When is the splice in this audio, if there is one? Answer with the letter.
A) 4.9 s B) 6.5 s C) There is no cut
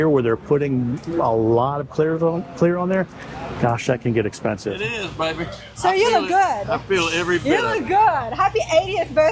A